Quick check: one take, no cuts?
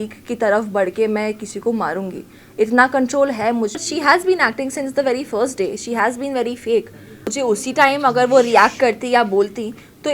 no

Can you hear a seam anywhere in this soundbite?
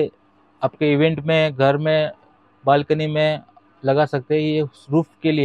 no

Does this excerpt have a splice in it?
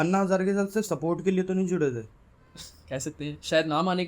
no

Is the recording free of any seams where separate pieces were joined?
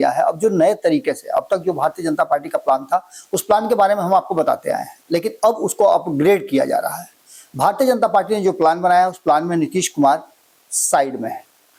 yes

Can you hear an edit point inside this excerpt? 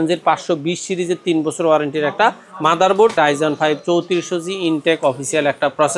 yes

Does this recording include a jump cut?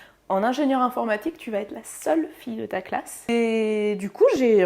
yes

